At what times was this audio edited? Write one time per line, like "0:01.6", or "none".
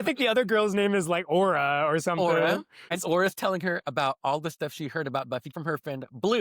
0:03.0
0:03.8
0:05.5